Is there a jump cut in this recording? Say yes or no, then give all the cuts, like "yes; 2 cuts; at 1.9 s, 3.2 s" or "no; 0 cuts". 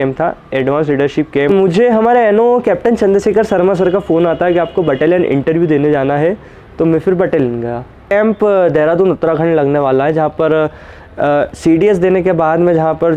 yes; 2 cuts; at 1.6 s, 8.1 s